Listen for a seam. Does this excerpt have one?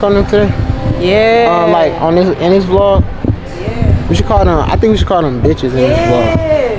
no; 0 cuts

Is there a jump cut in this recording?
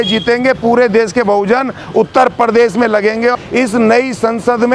yes; 1 cut; at 3.3 s

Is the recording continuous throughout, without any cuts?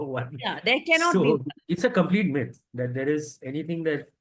no; 1 cut; at 1.5 s

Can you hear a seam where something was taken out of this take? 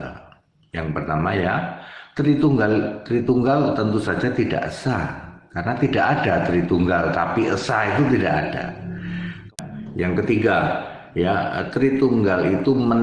yes; 1 cut; at 9.5 s

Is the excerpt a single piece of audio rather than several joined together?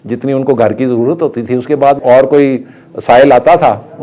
no; 1 cut; at 2.0 s

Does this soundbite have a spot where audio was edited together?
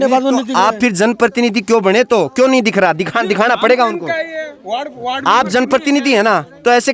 no; 0 cuts

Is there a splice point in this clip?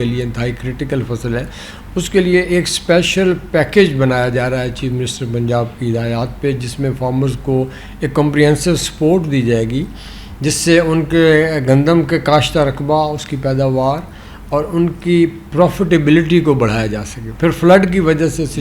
no; 0 cuts

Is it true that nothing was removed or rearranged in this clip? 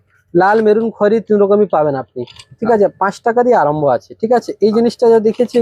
yes; 0 cuts

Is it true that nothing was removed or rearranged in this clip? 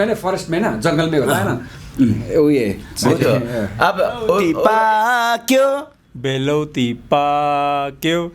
no; 1 cut; at 4.4 s

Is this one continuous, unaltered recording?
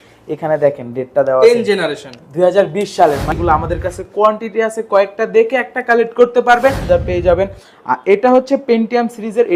no; 2 cuts; at 3.3 s, 6.8 s

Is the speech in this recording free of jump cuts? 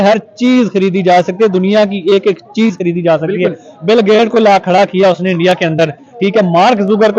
yes; 0 cuts

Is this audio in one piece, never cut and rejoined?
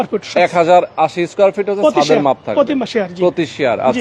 yes; 0 cuts

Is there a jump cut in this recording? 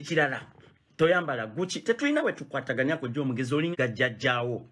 yes; 1 cut; at 3.7 s

